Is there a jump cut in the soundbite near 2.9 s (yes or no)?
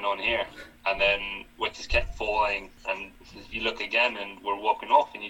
yes